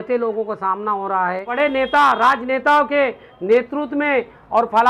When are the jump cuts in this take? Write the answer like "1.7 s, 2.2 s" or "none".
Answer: 1.5 s